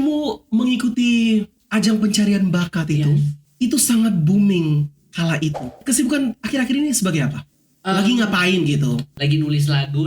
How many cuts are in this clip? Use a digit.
4